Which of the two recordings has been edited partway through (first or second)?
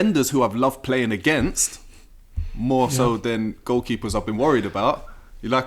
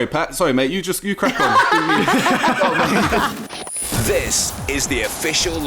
second